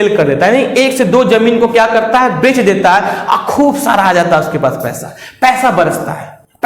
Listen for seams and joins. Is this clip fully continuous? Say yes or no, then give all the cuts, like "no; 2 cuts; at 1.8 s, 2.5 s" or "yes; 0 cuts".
yes; 0 cuts